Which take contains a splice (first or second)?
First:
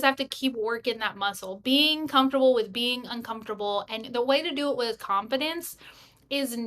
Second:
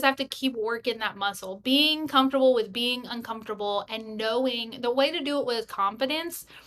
first